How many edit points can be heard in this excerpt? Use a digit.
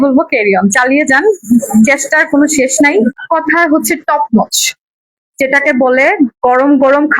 1